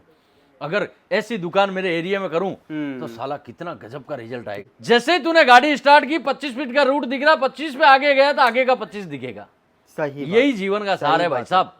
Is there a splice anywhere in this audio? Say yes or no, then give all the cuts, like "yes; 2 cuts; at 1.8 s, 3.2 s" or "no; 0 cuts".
yes; 1 cut; at 4.7 s